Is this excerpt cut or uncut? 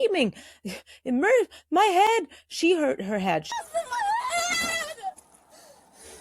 cut